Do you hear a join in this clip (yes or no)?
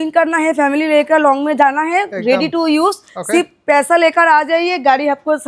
no